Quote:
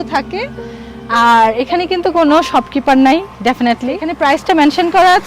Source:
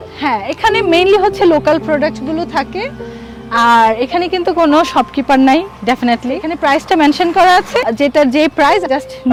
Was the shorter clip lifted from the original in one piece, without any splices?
yes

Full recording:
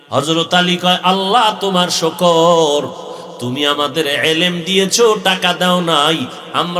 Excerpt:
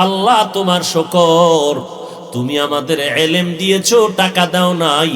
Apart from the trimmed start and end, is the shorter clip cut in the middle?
no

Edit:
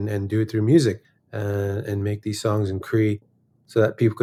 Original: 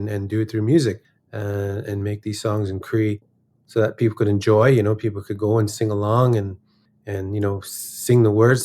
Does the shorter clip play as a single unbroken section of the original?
yes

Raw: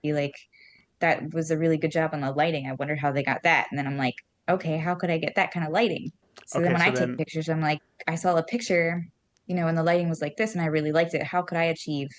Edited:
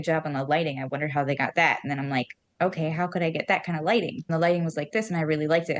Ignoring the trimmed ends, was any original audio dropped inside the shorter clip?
yes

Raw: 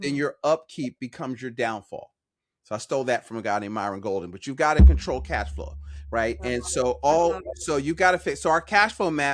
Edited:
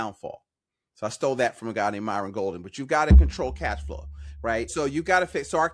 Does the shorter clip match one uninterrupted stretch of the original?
no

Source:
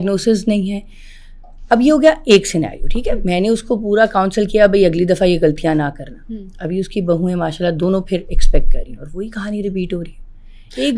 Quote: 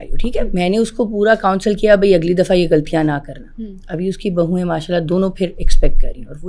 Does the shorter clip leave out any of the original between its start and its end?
no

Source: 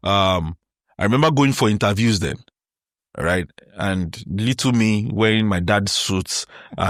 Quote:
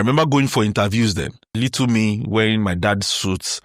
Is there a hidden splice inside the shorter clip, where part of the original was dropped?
yes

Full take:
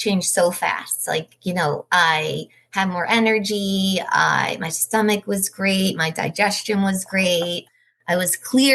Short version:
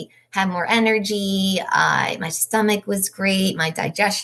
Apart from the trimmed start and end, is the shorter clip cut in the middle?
no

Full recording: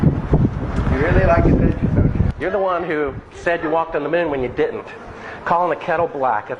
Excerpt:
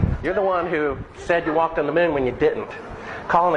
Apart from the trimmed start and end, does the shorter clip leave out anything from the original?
no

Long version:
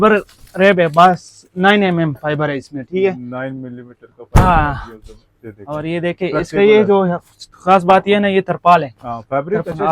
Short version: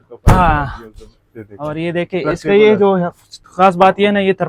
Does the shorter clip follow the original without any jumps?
yes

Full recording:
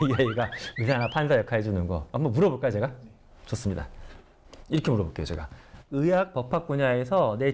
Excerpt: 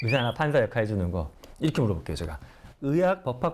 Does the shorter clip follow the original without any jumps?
no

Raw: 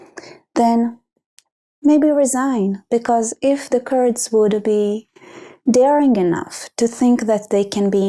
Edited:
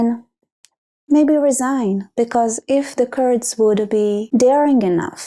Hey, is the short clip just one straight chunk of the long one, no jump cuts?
no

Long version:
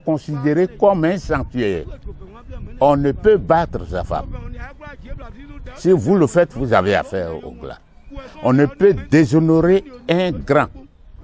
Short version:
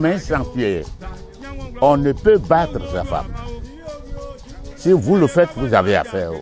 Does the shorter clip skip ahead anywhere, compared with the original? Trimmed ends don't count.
no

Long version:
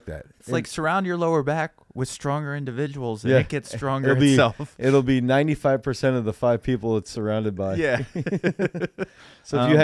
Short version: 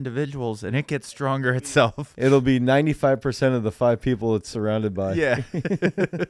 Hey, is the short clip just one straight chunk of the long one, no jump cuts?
yes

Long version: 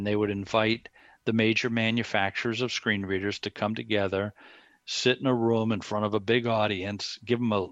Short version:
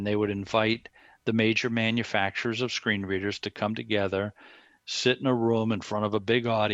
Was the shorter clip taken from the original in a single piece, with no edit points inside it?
yes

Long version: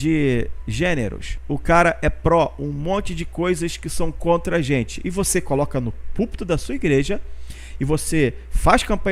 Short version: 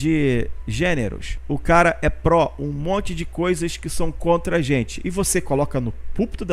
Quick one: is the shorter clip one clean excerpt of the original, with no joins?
yes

